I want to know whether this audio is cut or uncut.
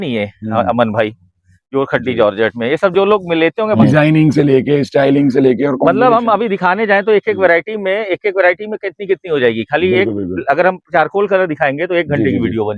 cut